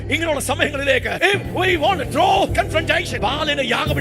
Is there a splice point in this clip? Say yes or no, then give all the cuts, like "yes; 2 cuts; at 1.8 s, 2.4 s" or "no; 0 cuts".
yes; 2 cuts; at 1.1 s, 2.7 s